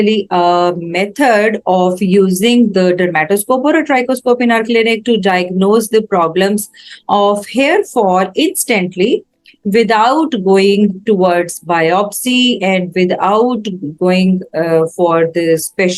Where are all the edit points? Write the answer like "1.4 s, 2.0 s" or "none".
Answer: none

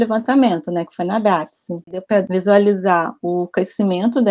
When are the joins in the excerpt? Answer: 2.1 s

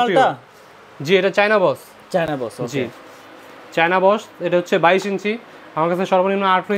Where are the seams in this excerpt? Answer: none

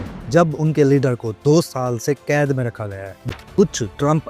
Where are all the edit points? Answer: 3.1 s

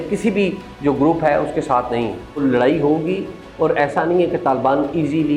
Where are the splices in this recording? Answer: 2.4 s

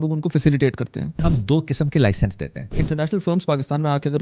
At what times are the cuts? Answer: 1.2 s, 2.8 s

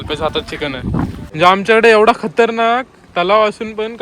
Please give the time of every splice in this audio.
1.3 s

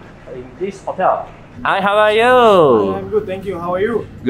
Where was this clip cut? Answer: 1.4 s

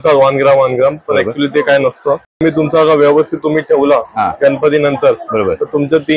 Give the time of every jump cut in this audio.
2.4 s

